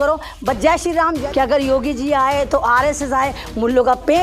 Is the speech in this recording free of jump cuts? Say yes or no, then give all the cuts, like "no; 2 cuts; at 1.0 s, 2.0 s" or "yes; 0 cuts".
no; 1 cut; at 1.2 s